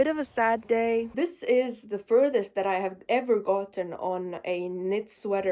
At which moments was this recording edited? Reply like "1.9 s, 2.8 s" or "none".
1.1 s